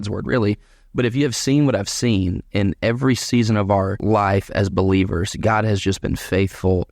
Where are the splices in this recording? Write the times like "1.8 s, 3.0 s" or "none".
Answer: 4.0 s